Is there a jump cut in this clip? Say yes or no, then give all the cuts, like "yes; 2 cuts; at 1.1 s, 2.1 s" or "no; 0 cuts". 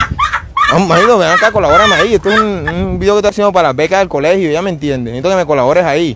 no; 0 cuts